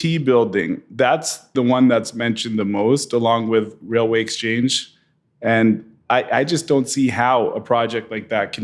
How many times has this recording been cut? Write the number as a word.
one